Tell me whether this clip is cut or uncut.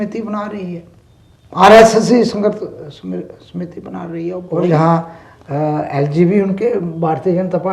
cut